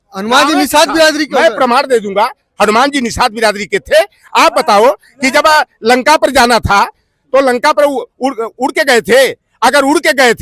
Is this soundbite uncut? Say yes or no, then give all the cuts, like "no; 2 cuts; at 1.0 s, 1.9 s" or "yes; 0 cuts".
yes; 0 cuts